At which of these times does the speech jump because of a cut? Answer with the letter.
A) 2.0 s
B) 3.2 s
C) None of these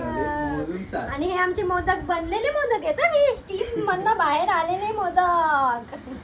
C